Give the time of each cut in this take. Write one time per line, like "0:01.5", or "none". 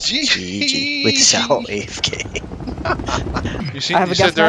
0:03.5